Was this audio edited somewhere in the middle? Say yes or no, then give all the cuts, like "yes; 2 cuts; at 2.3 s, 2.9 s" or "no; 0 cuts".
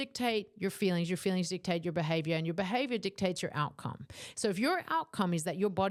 no; 0 cuts